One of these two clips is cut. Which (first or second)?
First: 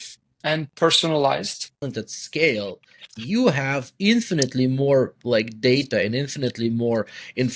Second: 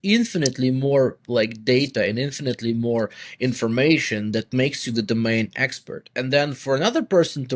first